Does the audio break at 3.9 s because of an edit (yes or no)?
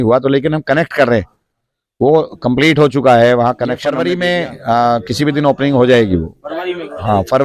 yes